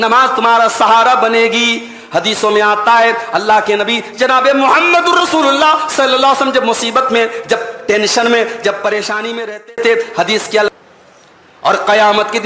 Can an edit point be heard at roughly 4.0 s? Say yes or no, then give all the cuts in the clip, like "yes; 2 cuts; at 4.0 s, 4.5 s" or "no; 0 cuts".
no; 1 cut; at 10.7 s